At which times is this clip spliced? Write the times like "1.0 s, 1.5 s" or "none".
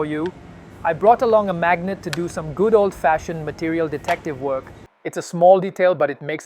4.8 s